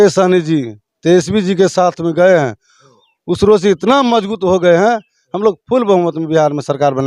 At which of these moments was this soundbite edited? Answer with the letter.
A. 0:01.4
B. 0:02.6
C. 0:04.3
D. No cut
D